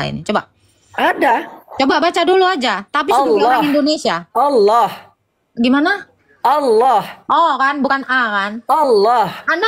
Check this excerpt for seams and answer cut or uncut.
uncut